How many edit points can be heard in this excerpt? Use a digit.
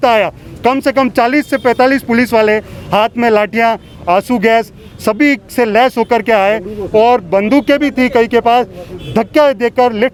0